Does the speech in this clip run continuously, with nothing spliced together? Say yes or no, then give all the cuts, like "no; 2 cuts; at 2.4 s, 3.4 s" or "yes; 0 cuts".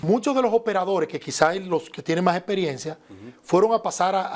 yes; 0 cuts